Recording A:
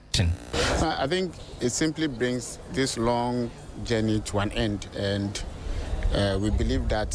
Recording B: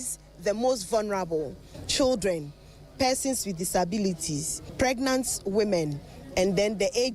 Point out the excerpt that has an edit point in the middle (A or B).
B